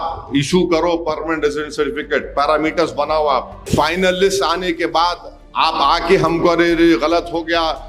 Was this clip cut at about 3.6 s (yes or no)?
yes